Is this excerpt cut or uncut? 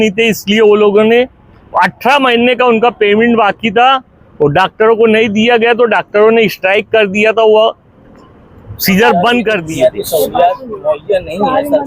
cut